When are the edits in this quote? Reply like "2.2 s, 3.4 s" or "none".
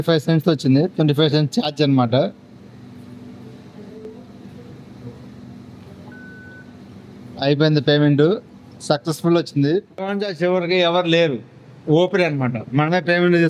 10.1 s